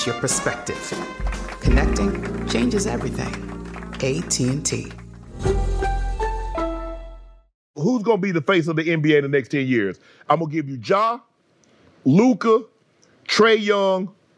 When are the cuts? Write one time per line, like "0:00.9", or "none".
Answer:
0:07.7